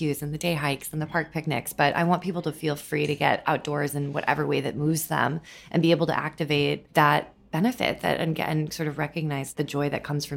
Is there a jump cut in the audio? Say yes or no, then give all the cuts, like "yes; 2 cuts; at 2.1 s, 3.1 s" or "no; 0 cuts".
yes; 2 cuts; at 6.8 s, 9.5 s